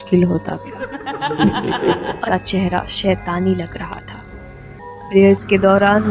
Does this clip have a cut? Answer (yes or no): yes